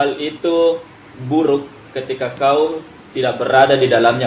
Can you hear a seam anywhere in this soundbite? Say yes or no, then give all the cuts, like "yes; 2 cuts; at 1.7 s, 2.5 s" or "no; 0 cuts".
no; 0 cuts